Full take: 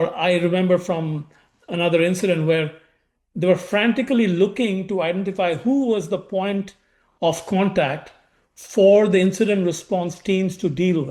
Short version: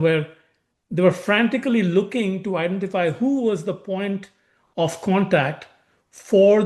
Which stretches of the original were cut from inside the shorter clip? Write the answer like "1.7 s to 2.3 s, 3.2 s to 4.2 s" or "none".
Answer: none